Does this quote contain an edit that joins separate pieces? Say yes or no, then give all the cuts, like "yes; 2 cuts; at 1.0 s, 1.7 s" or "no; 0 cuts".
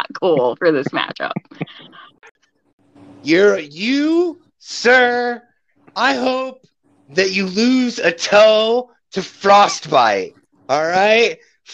yes; 1 cut; at 2.3 s